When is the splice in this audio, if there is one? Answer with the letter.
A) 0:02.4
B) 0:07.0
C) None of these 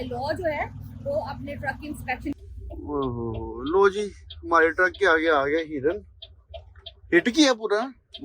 A